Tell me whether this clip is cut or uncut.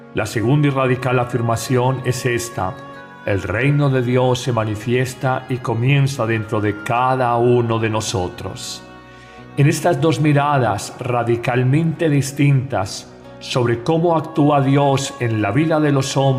uncut